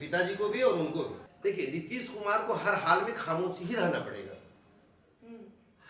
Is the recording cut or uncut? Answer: cut